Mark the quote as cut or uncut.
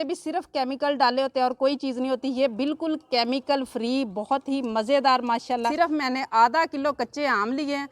cut